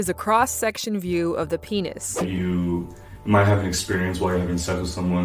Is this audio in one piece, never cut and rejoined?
no; 1 cut; at 2.2 s

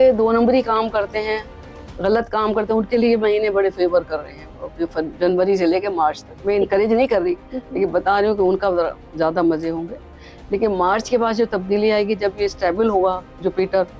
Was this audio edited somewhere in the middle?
no; 0 cuts

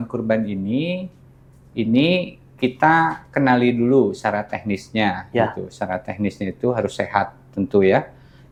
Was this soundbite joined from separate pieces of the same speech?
no; 0 cuts

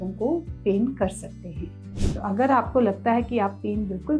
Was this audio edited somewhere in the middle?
yes; 1 cut; at 1.9 s

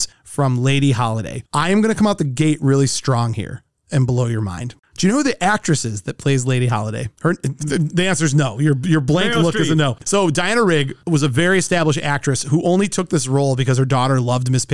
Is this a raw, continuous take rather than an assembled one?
no; 2 cuts; at 4.7 s, 10.0 s

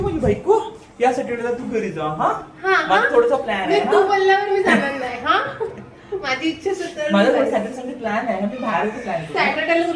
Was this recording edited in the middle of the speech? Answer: no; 0 cuts

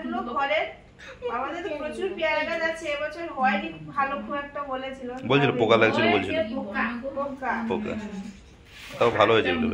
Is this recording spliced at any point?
no; 0 cuts

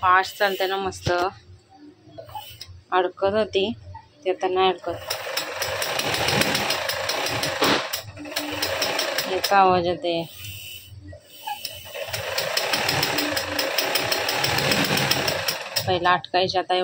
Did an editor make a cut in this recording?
no; 0 cuts

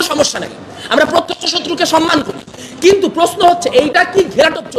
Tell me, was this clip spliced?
yes; 1 cut; at 2.5 s

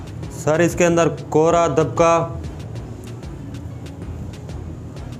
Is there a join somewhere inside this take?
no; 0 cuts

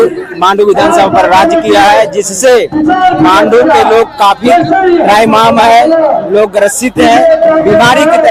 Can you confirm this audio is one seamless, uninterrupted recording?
yes; 0 cuts

